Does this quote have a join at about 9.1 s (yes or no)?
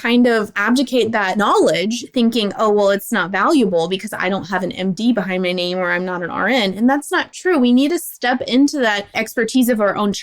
no